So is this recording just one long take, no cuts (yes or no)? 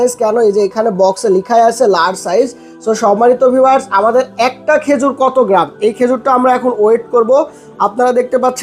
yes